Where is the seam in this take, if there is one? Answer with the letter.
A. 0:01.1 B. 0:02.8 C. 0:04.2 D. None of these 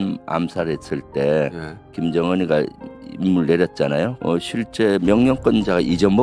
C